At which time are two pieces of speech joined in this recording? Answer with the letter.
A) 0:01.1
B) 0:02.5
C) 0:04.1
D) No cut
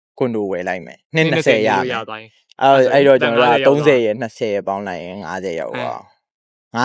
A